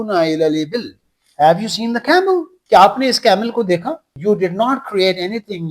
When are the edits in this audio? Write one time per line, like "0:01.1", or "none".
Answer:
0:04.1